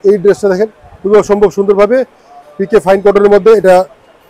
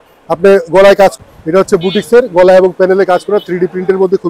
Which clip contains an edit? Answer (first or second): second